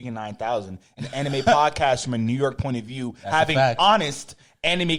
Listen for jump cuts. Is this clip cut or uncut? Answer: uncut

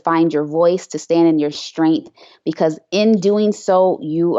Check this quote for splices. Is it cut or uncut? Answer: uncut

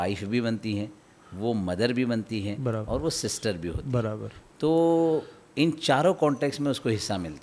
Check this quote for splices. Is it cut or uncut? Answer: uncut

